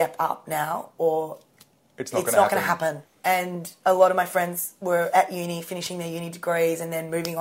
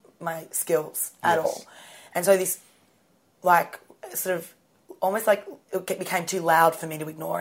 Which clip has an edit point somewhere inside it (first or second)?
first